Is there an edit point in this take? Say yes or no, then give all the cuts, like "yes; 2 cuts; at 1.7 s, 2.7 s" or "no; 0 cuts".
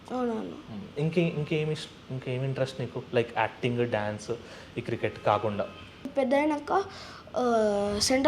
yes; 1 cut; at 6.1 s